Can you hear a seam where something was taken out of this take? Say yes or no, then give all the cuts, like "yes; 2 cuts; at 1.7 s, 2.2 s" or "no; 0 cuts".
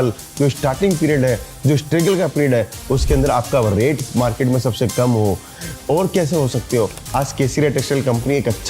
yes; 1 cut; at 7.0 s